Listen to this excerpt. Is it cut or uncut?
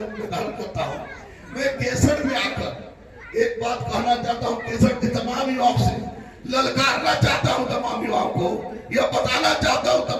uncut